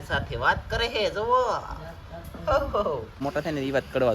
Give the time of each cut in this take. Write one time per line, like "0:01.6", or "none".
0:03.2